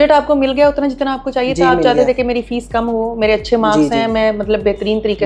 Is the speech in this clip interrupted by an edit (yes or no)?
no